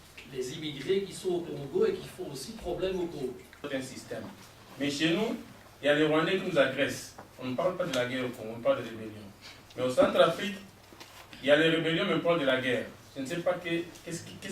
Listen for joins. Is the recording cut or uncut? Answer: cut